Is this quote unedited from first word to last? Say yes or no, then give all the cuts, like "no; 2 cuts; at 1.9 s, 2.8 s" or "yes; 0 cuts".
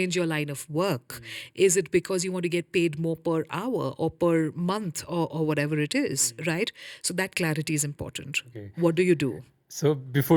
yes; 0 cuts